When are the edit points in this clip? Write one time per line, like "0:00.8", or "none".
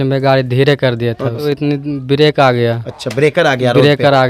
0:01.4